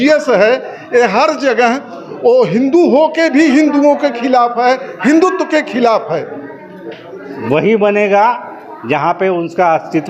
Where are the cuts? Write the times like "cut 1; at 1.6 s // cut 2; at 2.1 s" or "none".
cut 1; at 7.4 s